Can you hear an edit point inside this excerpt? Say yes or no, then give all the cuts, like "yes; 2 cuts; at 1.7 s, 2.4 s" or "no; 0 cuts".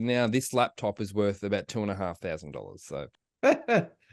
yes; 1 cut; at 3.2 s